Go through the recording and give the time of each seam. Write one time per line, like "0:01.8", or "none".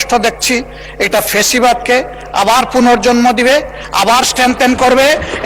none